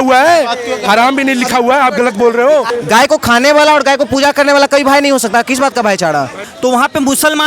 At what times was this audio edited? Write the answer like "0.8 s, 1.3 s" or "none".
2.7 s, 6.5 s